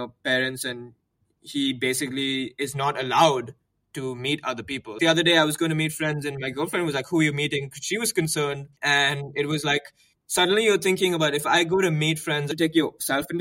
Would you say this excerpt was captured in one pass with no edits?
no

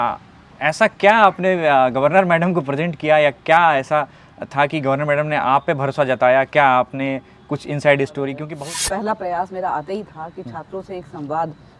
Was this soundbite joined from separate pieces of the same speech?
yes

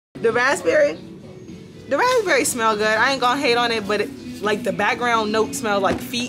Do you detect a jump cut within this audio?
no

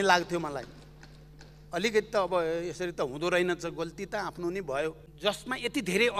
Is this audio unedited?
no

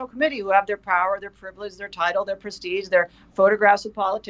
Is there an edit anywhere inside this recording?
no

